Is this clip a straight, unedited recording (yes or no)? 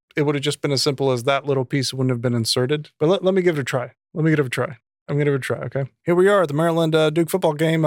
no